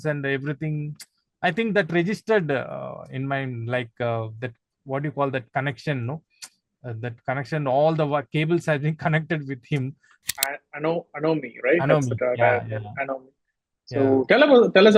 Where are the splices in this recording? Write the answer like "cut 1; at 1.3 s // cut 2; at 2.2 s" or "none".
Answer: cut 1; at 10.2 s

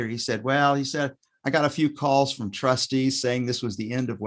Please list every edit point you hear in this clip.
none

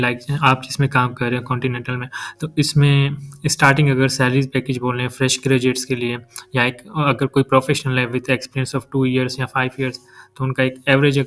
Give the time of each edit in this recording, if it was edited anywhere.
none

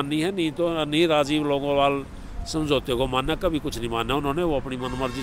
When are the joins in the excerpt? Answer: none

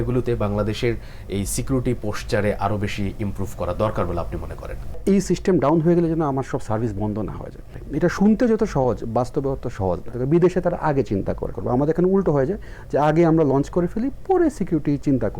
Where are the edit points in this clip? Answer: cut 1; at 5.0 s // cut 2; at 7.8 s // cut 3; at 10.2 s // cut 4; at 11.5 s

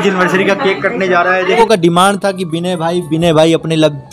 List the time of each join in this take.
cut 1; at 1.6 s

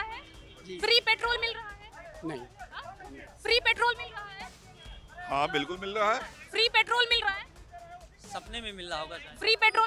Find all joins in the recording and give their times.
none

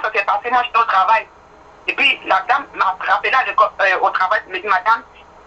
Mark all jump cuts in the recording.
none

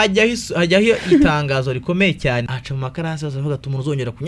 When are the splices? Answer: cut 1; at 2.5 s

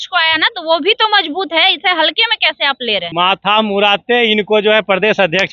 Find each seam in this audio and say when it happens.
cut 1; at 3.1 s

